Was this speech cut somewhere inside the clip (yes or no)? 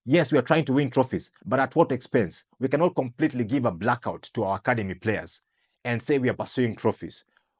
no